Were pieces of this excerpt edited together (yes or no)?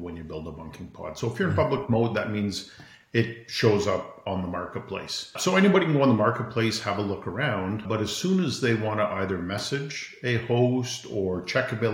yes